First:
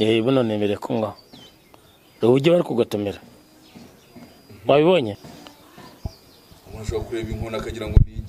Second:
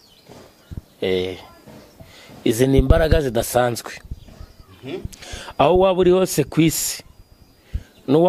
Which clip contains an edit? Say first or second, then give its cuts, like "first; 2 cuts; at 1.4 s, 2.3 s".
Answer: first; 1 cut; at 5.2 s